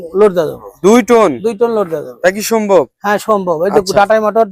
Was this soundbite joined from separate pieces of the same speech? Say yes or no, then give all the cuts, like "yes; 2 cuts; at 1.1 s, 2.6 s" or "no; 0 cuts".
no; 0 cuts